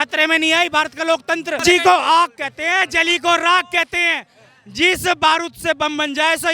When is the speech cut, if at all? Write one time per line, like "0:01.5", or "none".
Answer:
0:01.6